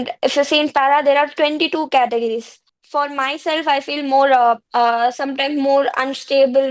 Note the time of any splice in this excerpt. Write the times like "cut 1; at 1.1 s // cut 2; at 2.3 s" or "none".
cut 1; at 2.8 s // cut 2; at 4.7 s